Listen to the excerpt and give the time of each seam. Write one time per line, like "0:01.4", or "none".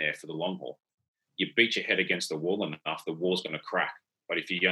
0:01.2

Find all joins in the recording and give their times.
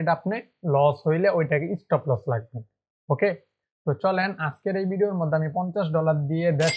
none

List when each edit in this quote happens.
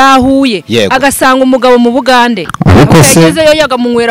0:02.5

